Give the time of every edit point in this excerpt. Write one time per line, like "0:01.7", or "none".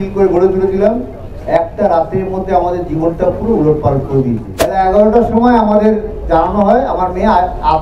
0:04.5